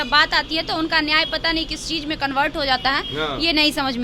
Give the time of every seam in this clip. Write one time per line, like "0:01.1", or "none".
none